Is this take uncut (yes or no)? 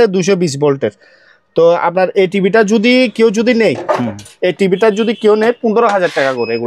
yes